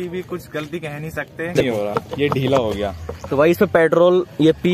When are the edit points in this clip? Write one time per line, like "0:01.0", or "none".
0:01.6